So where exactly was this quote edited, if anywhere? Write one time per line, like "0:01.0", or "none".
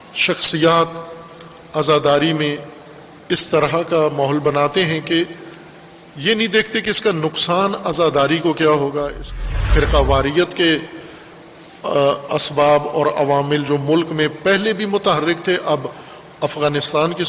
0:09.7

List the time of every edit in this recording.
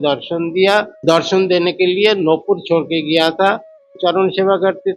0:00.9
0:04.0

